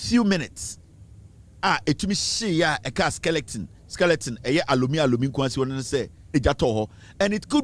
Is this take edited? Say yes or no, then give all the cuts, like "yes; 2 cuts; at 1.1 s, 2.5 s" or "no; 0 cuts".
yes; 1 cut; at 6.3 s